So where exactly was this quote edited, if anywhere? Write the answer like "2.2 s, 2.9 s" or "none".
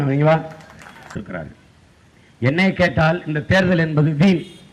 1.2 s